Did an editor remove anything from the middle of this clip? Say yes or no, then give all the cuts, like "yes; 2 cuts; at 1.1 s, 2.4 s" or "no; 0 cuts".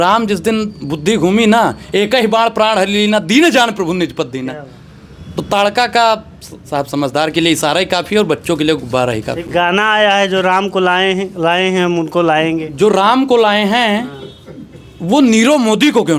no; 0 cuts